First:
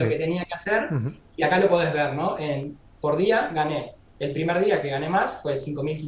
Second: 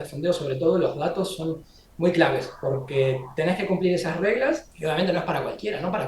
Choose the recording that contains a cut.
second; 1 cut; at 4.7 s

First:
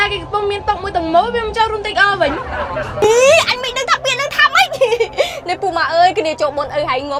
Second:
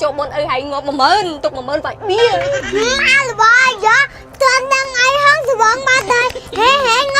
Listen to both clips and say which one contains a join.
second; 1 cut; at 2.4 s

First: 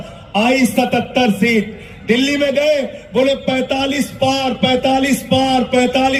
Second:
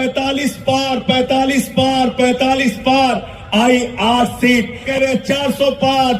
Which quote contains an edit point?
second; 1 cut; at 4.8 s

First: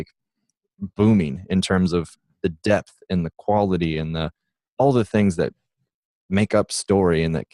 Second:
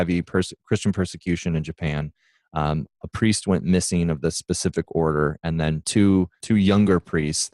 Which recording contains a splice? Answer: second; 1 cut; at 6.4 s

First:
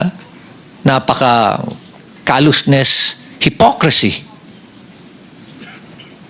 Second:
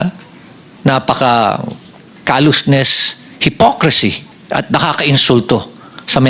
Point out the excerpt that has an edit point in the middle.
second; 1 cut; at 4.3 s

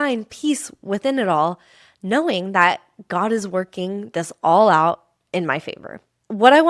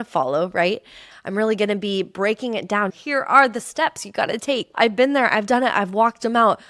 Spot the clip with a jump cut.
second; 3 cuts; at 1.1 s, 2.9 s, 4.7 s

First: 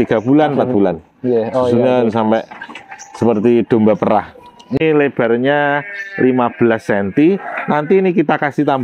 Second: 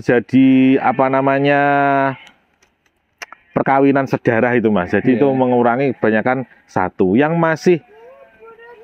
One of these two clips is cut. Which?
first; 1 cut; at 4.8 s

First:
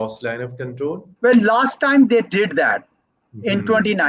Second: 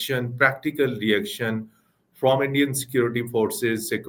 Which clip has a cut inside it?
first; 1 cut; at 1.1 s

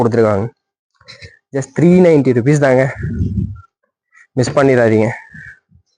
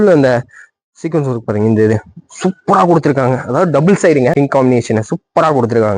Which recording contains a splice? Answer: second; 1 cut; at 4.3 s

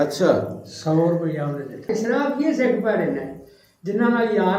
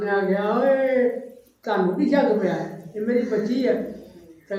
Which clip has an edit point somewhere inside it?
first; 1 cut; at 1.9 s

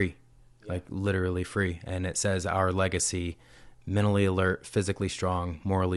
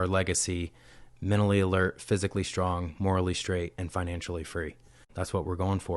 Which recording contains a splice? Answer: second; 1 cut; at 5.1 s

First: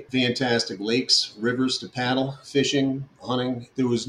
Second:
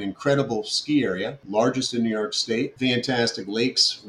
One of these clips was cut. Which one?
first; 1 cut; at 2.4 s

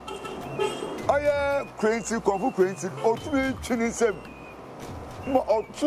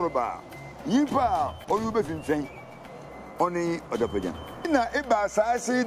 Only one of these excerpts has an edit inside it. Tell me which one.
second; 1 cut; at 4.7 s

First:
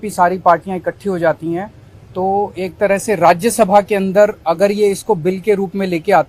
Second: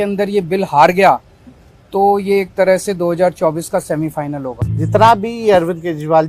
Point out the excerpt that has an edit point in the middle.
second; 1 cut; at 4.6 s

